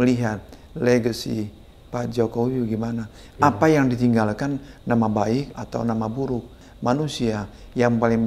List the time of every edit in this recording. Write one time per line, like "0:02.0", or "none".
0:05.5
0:06.6